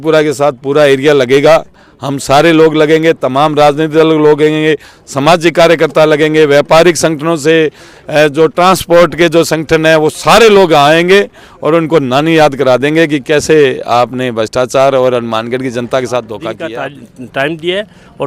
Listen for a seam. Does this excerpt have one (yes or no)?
yes